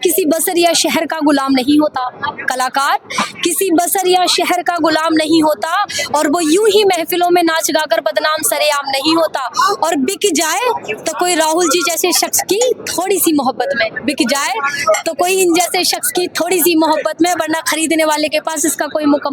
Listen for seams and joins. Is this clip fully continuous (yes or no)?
yes